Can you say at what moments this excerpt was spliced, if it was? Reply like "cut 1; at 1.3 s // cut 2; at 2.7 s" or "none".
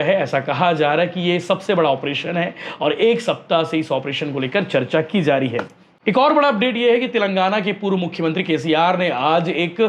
none